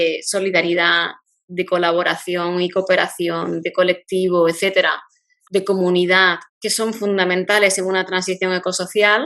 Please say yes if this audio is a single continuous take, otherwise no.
yes